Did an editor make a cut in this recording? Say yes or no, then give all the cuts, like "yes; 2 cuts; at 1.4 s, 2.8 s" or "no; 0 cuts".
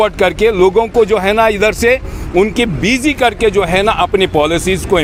no; 0 cuts